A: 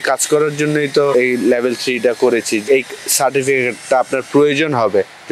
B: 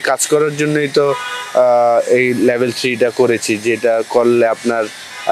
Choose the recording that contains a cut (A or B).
A